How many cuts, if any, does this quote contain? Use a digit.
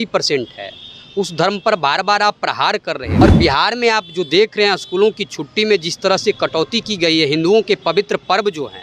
1